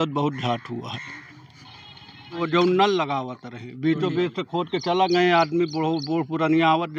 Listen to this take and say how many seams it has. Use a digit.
1